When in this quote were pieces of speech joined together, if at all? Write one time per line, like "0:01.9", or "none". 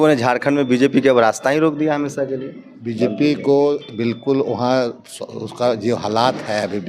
none